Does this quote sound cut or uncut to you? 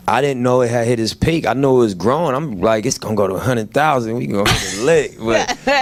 uncut